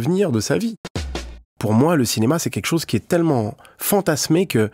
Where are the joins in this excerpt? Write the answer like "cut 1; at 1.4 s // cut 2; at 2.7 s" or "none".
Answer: cut 1; at 1.1 s